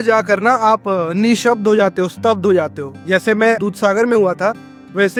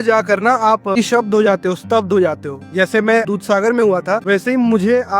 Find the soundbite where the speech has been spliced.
second; 2 cuts; at 1.0 s, 4.2 s

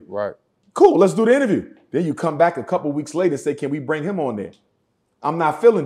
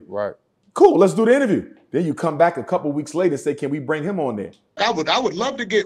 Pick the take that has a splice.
first; 1 cut; at 4.7 s

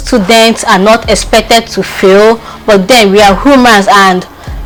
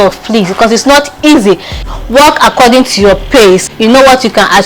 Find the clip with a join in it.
second; 2 cuts; at 1.7 s, 3.7 s

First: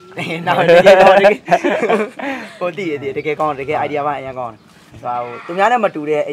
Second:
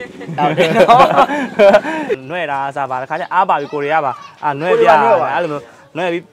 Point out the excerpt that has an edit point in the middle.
second; 1 cut; at 2.2 s

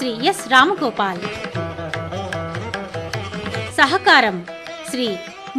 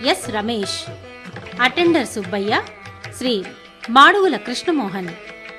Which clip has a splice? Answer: first; 2 cuts; at 1.8 s, 3.7 s

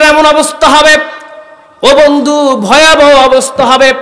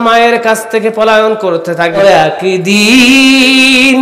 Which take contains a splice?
second; 1 cut; at 2.0 s

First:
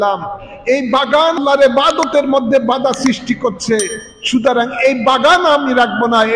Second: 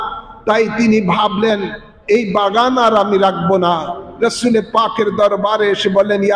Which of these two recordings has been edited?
first; 1 cut; at 1.4 s

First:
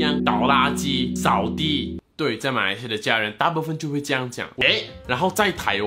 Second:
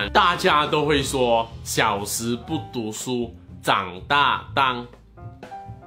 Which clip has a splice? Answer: first; 1 cut; at 4.5 s

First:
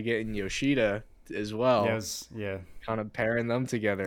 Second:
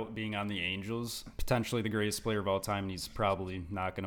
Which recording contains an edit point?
second; 1 cut; at 1.4 s

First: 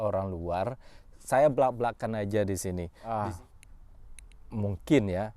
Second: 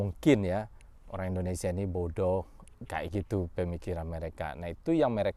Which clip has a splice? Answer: first; 1 cut; at 2.9 s

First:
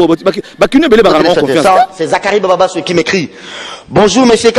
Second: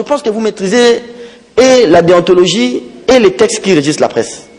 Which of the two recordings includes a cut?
first; 1 cut; at 1.8 s

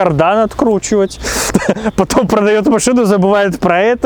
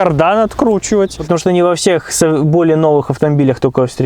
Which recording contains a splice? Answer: second; 1 cut; at 1.2 s

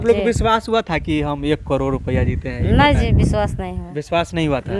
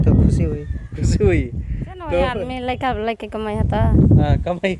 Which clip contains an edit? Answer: second; 1 cut; at 2.5 s

